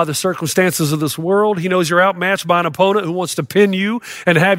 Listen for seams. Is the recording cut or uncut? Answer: uncut